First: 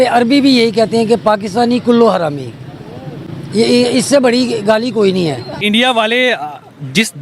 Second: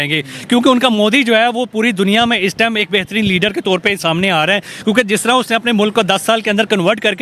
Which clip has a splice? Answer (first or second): first